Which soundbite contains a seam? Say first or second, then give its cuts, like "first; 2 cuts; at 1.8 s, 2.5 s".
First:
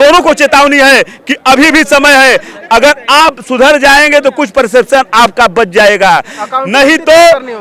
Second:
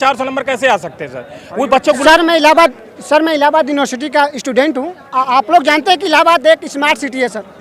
second; 1 cut; at 2.0 s